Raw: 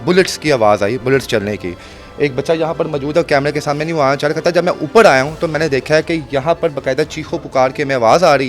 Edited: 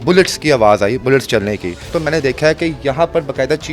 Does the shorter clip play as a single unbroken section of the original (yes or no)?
no